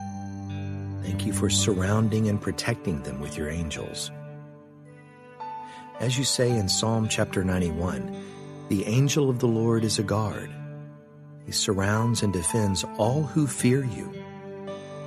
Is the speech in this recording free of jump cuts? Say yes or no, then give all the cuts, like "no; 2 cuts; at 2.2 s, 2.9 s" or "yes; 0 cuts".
yes; 0 cuts